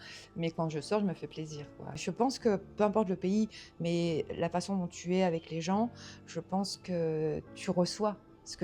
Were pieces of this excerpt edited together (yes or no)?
yes